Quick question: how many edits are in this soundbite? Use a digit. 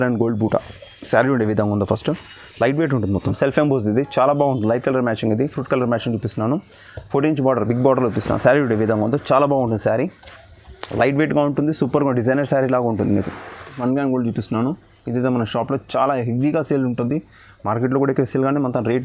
2